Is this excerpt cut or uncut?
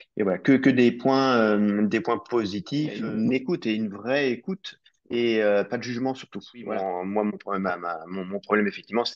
cut